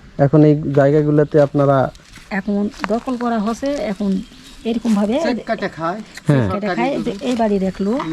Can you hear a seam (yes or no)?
no